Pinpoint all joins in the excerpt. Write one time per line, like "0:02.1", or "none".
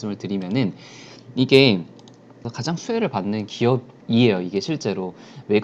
0:02.5